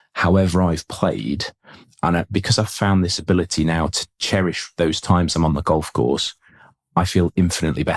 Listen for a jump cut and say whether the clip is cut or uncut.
cut